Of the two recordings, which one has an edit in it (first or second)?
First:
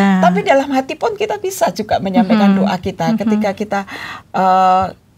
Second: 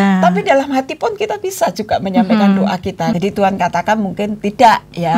second